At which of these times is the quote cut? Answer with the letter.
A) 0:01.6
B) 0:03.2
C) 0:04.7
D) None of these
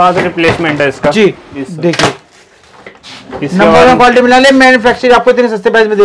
A